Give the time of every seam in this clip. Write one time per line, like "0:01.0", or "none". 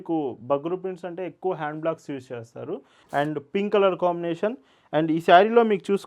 0:02.9